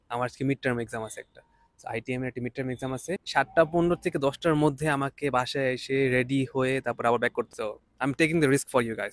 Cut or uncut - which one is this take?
cut